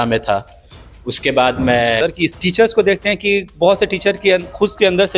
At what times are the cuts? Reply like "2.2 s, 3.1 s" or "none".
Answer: 2.0 s

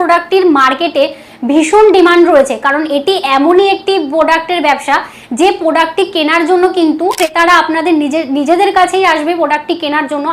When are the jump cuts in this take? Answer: 7.2 s

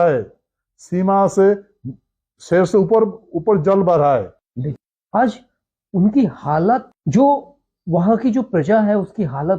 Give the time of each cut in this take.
4.7 s, 7.0 s

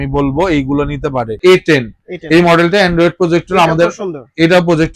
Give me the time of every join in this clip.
1.4 s

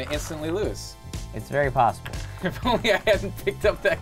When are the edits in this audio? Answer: none

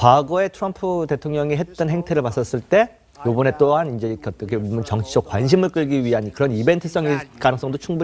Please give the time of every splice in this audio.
none

